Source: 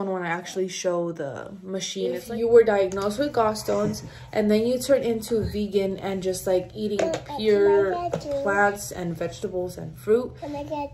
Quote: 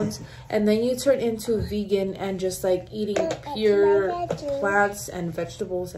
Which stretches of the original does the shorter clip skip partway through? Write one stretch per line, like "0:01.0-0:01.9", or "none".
none

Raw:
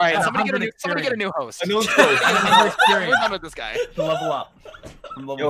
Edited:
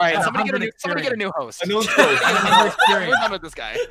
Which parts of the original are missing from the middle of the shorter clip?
none

